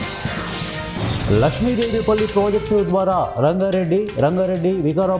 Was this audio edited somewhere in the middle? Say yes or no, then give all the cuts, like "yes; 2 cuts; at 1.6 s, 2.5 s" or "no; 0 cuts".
yes; 1 cut; at 1.2 s